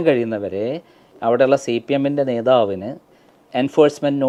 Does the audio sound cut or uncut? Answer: uncut